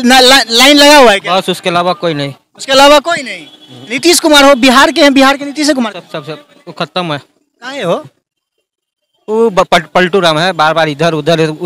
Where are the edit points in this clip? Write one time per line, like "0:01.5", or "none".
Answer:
none